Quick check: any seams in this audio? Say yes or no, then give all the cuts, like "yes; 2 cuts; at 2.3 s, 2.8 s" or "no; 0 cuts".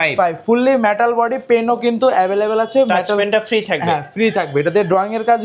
no; 0 cuts